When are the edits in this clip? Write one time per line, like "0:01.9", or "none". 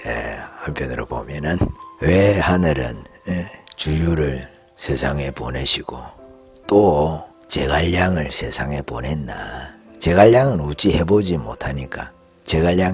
none